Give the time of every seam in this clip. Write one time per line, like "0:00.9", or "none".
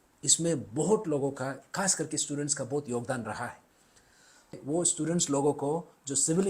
0:04.5